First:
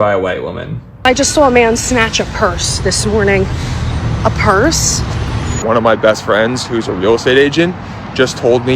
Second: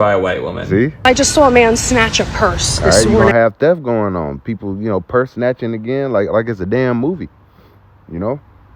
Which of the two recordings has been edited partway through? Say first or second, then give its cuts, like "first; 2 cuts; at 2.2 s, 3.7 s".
first; 1 cut; at 2.9 s